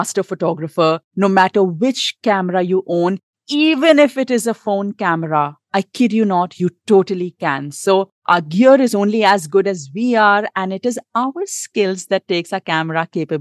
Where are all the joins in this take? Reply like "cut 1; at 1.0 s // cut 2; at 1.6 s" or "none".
none